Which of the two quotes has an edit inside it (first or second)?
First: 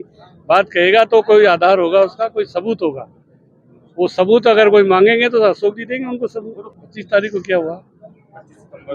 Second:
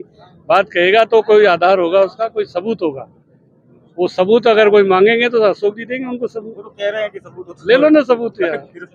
first